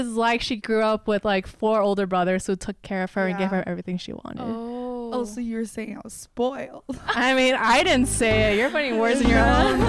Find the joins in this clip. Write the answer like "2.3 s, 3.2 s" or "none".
none